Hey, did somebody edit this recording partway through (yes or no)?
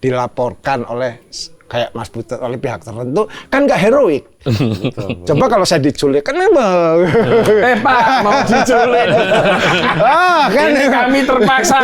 no